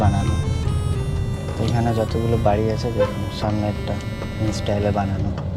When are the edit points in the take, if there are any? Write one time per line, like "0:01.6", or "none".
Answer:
0:01.4
0:04.3